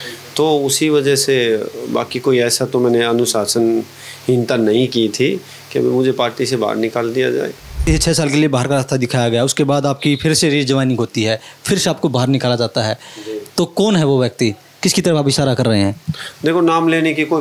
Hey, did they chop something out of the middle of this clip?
yes; 1 cut; at 7.8 s

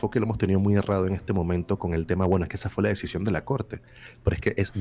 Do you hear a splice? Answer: no; 0 cuts

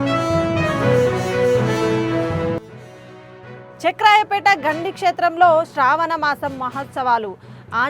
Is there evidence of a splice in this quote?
yes; 1 cut; at 2.5 s

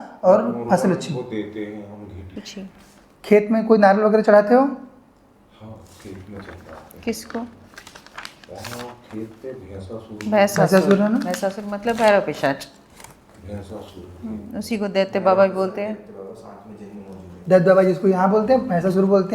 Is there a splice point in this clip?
yes; 1 cut; at 2.2 s

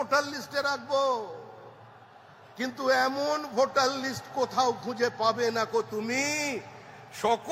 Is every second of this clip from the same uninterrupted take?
yes; 0 cuts

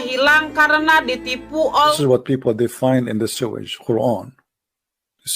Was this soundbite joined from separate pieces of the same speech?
yes; 1 cut; at 1.9 s

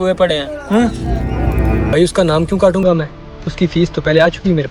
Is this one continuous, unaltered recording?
no; 1 cut; at 1.9 s

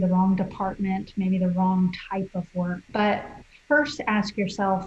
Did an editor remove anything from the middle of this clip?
no; 0 cuts

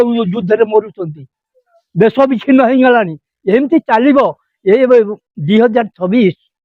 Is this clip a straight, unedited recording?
yes; 0 cuts

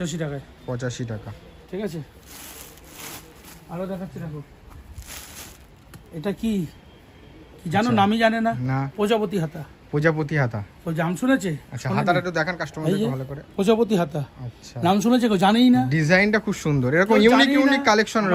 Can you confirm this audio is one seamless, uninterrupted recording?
yes; 0 cuts

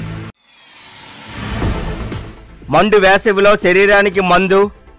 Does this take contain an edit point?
no; 0 cuts

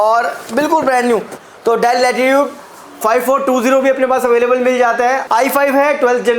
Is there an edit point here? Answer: yes; 2 cuts; at 1.4 s, 5.2 s

